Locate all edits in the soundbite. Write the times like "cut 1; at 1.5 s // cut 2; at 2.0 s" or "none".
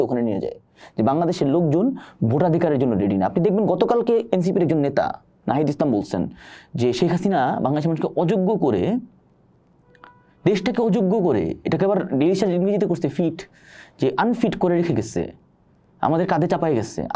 none